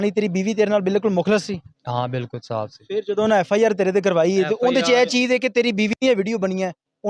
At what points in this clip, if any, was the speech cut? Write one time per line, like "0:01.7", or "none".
none